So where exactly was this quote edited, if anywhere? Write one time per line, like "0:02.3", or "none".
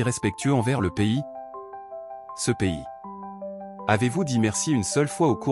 none